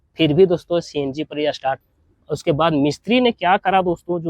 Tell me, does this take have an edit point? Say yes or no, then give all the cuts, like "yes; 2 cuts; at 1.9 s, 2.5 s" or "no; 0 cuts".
yes; 1 cut; at 1.8 s